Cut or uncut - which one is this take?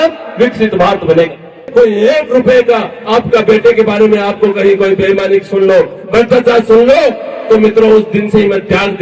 cut